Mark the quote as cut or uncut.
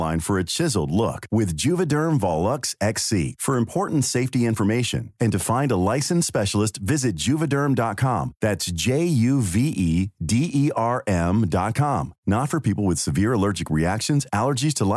uncut